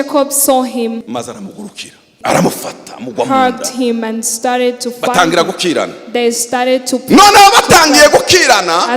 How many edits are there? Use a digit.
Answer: 2